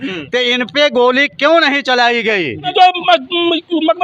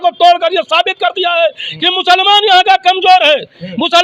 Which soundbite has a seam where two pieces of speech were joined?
first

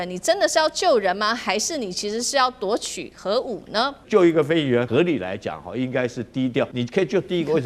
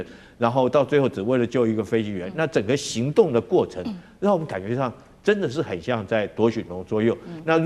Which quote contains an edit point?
first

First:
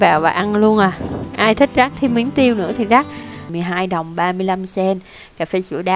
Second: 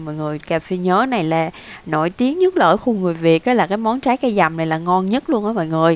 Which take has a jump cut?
first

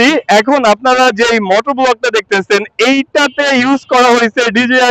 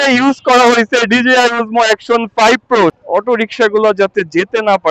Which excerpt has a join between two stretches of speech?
second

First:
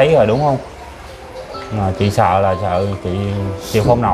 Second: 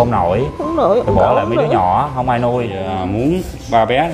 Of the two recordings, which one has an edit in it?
second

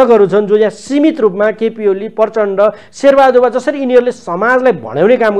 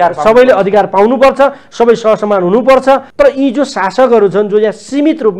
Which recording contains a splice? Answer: second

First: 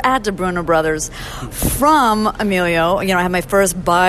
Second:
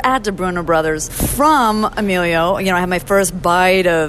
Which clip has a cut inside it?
second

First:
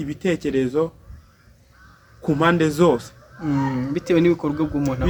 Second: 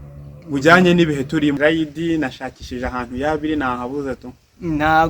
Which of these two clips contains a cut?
second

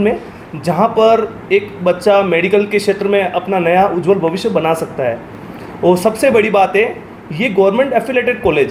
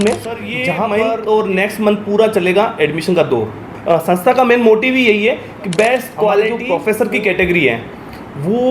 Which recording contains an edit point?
second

